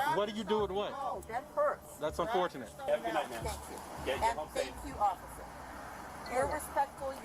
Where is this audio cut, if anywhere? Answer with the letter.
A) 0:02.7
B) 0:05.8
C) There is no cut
A